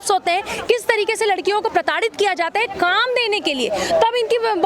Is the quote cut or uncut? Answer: uncut